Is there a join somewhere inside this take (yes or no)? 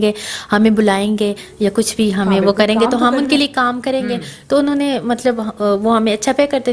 no